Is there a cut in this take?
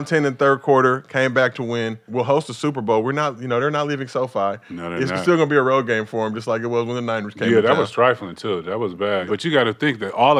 yes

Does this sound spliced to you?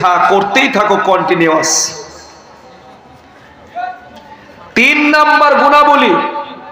no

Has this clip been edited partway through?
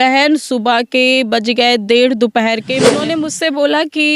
yes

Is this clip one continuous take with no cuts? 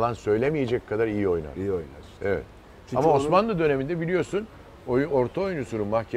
yes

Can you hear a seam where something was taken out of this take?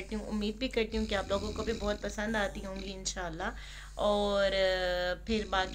no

